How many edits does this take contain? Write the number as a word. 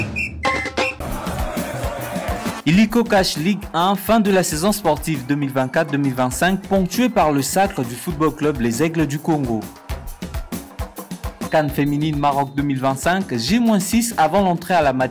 one